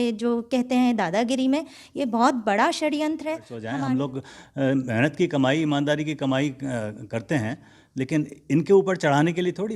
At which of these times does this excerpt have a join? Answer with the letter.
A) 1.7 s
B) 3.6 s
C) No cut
B